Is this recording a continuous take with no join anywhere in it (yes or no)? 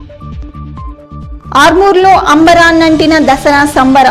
yes